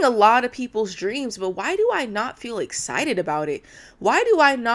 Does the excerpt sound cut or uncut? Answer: uncut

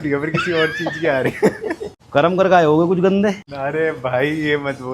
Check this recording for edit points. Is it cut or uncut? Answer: cut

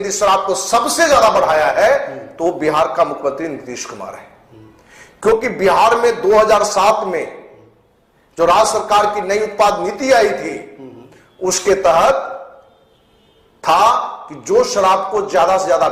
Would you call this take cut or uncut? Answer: uncut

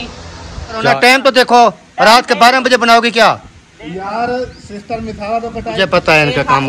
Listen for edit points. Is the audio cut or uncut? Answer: cut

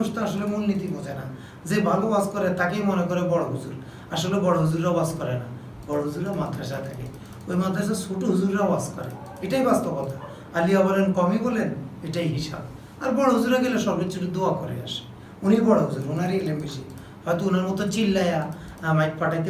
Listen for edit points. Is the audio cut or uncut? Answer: uncut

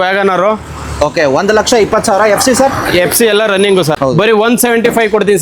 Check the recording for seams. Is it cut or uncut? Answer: cut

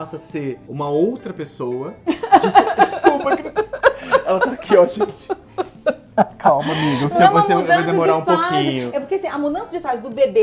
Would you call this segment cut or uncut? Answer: uncut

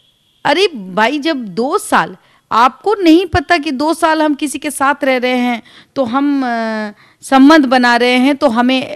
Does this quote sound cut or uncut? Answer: uncut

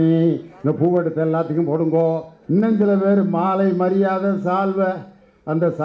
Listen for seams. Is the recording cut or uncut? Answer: cut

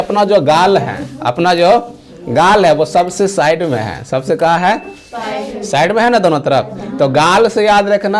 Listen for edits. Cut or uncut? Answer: uncut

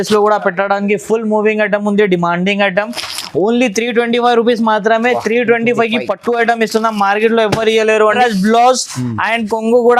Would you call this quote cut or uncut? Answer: cut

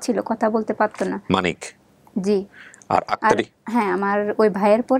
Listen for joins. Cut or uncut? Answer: uncut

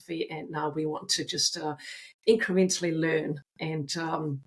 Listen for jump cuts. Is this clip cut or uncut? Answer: uncut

